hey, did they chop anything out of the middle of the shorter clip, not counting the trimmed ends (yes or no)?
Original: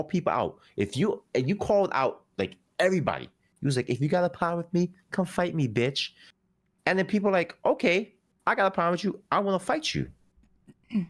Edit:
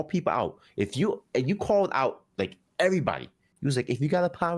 no